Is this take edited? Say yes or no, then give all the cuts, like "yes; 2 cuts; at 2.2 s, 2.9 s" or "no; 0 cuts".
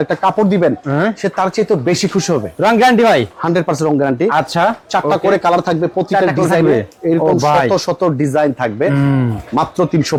no; 0 cuts